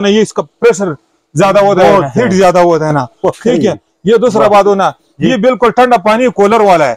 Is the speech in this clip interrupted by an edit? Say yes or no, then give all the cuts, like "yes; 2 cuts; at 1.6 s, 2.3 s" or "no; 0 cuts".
no; 0 cuts